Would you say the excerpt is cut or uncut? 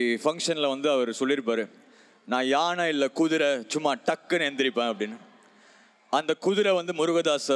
uncut